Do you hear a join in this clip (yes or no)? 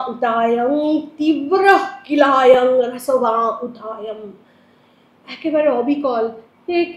no